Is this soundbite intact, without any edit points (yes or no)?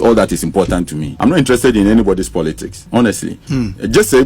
no